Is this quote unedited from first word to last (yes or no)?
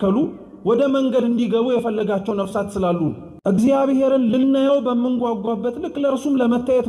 no